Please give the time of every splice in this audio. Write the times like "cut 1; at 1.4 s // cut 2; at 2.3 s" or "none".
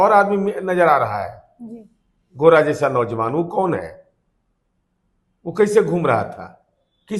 none